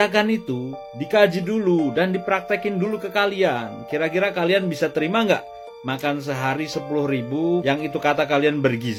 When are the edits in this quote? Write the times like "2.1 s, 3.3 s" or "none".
none